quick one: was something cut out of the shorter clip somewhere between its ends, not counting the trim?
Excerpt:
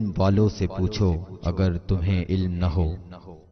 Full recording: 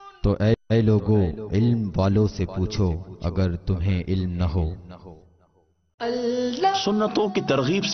no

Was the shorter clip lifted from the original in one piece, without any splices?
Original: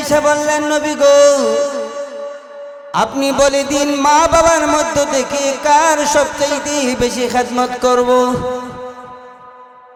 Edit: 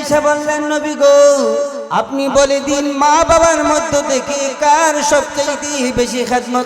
no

